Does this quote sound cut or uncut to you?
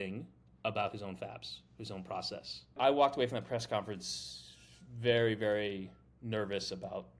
cut